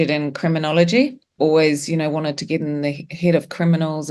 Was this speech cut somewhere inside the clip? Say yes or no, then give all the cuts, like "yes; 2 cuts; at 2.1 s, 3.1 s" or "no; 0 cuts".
yes; 1 cut; at 1.3 s